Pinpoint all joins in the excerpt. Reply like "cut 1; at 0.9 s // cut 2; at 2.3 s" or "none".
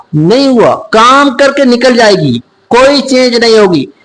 none